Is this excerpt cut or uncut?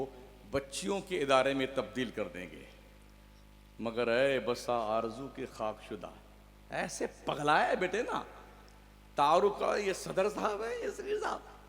uncut